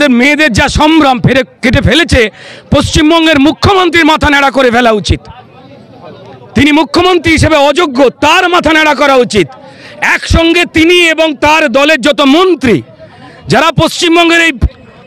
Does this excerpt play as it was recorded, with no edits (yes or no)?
yes